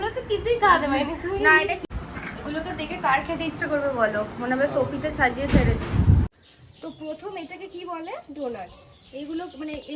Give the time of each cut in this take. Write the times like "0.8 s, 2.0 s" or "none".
1.8 s, 6.3 s